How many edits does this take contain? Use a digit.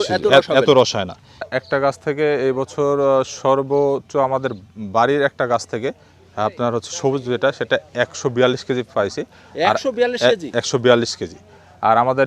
1